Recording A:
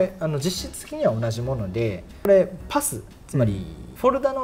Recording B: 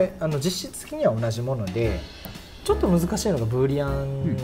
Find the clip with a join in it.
B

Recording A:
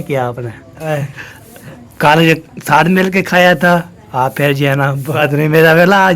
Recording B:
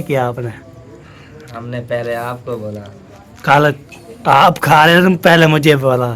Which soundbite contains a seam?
A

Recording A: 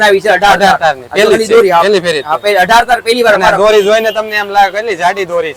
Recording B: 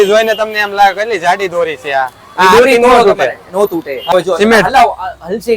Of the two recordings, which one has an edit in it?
B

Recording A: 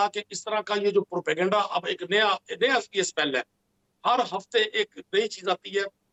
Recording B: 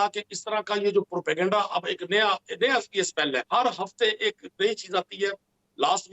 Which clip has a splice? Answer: B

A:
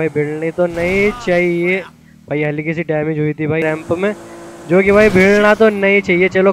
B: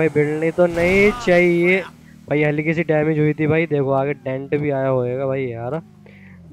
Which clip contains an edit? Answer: A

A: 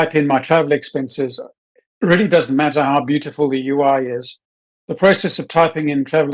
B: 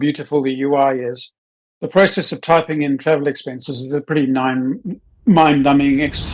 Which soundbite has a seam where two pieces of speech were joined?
B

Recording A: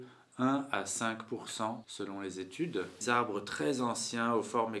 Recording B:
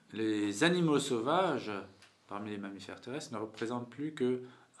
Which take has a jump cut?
A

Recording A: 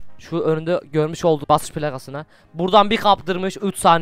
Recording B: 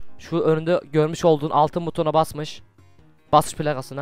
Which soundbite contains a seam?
A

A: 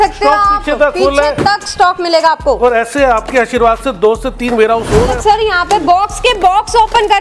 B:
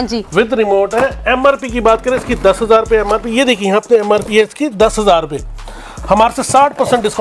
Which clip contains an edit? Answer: A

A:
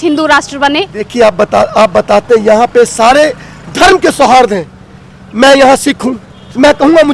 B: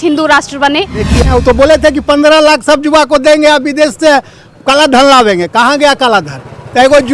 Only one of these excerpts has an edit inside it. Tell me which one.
B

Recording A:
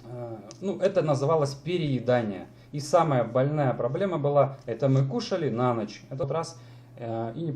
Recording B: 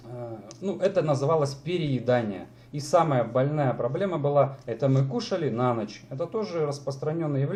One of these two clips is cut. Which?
A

